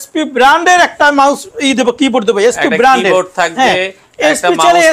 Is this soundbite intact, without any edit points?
yes; 0 cuts

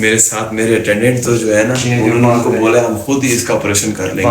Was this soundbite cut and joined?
no; 0 cuts

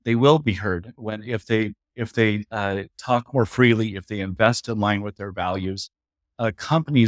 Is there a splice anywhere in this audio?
no; 0 cuts

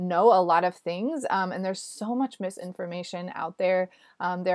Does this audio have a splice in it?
no; 0 cuts

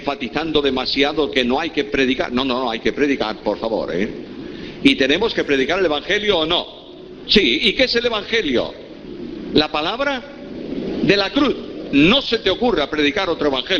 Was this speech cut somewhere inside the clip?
no; 0 cuts

